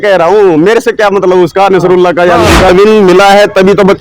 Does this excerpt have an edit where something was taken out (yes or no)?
yes